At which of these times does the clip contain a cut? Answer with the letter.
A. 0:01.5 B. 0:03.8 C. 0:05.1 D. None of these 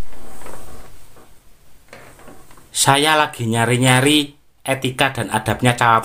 D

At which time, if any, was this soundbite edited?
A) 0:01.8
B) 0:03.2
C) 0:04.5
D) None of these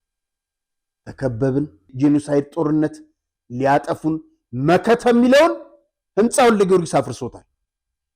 A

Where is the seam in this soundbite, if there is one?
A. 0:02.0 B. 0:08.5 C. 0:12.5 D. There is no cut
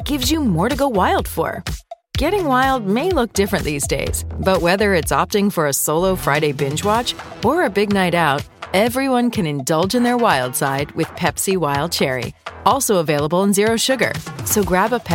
D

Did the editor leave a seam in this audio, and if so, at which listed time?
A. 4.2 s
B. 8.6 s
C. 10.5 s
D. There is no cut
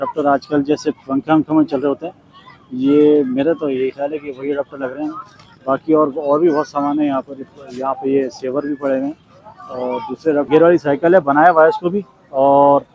C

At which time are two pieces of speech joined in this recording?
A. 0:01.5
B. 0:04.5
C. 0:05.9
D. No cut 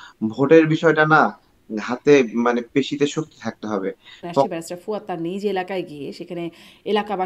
B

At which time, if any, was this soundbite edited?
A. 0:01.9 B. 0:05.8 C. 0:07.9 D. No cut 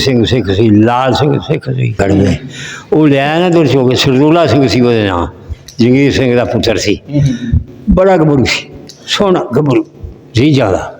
A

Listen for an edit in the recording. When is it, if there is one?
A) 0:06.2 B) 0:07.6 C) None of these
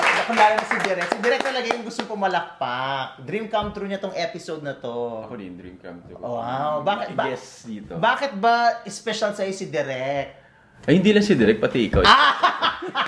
C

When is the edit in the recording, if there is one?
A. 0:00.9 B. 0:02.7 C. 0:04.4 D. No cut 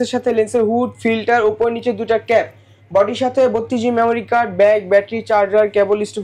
D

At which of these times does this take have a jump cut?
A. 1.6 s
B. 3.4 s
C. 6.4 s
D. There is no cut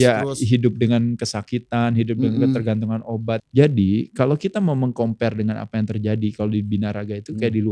B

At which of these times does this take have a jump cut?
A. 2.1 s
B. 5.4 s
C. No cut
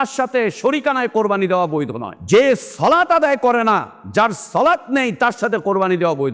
A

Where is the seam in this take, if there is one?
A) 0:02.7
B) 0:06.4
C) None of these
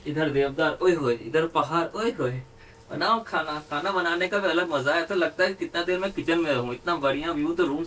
C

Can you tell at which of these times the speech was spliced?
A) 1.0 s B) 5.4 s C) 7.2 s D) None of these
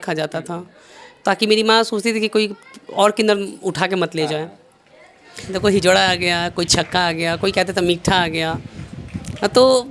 B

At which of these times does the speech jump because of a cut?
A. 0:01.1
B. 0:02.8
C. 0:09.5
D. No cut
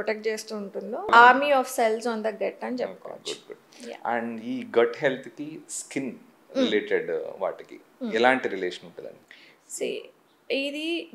A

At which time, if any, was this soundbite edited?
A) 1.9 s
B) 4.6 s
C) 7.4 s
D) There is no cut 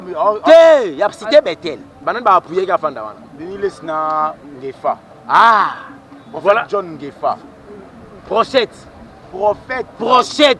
A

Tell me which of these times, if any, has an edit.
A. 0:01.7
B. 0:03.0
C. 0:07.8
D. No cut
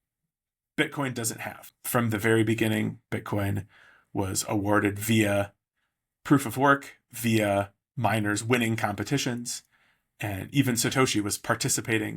A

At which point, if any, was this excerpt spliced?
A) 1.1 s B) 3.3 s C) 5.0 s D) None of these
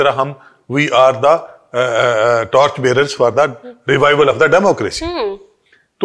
D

